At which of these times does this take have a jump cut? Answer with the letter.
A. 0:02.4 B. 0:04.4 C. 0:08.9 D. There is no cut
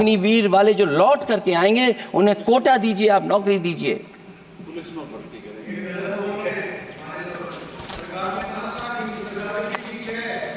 D